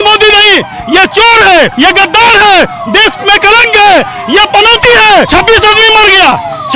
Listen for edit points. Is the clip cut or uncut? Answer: cut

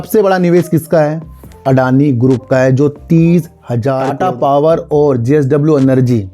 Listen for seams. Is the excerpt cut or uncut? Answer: cut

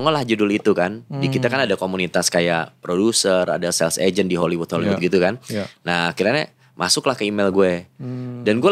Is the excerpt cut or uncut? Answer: uncut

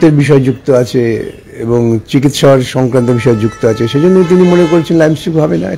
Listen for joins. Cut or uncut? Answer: uncut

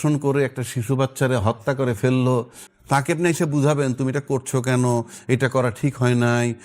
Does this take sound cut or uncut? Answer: cut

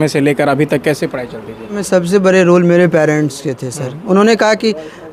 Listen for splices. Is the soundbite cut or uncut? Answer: cut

